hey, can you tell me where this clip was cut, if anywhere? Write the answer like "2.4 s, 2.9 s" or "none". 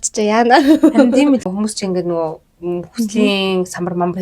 1.4 s